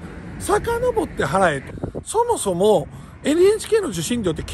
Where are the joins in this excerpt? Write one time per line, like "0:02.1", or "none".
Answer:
0:01.7